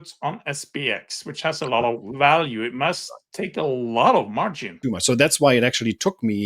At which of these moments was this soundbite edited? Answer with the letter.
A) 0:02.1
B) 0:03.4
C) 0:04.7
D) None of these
C